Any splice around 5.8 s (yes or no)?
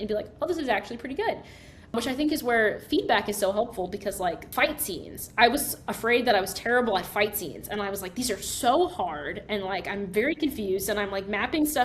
no